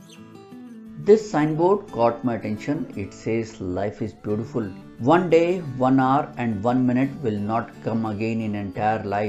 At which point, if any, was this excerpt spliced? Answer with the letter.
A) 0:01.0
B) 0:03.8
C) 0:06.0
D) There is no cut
A